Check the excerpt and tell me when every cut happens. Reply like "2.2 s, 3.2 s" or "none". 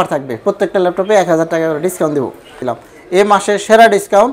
2.6 s

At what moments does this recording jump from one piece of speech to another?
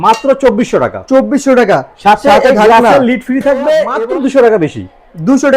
3.9 s

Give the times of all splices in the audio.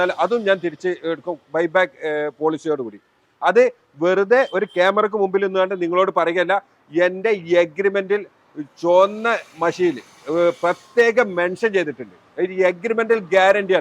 none

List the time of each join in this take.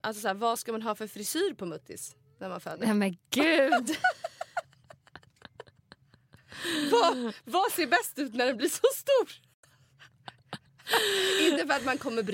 none

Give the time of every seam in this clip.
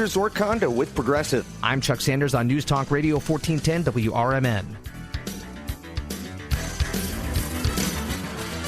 4.8 s

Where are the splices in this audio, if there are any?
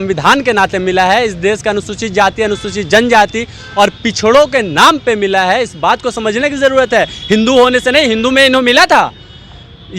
none

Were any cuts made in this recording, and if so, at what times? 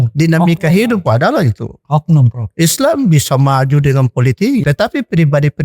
4.6 s

